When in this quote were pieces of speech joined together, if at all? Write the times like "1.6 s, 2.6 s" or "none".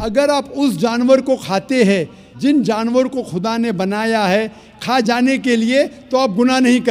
none